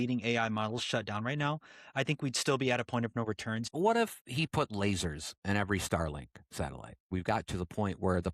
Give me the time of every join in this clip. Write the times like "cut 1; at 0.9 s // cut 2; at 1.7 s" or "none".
cut 1; at 3.7 s // cut 2; at 7.1 s